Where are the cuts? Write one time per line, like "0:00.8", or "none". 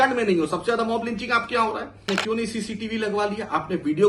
0:02.0